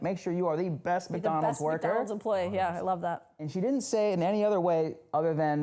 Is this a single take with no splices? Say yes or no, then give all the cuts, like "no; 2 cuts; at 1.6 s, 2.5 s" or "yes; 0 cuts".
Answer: yes; 0 cuts